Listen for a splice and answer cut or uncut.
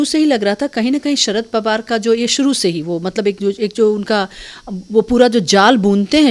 uncut